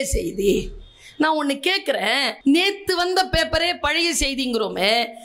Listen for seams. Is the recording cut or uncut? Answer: cut